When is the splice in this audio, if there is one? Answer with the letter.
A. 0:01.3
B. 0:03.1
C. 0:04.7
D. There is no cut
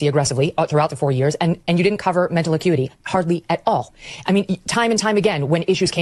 D